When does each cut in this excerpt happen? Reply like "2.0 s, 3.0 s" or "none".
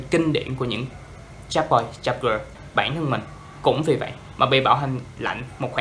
2.6 s